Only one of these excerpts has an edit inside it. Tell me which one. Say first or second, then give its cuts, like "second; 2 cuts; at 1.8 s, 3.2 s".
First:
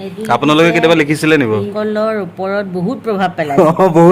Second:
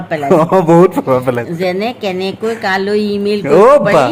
first; 1 cut; at 1.7 s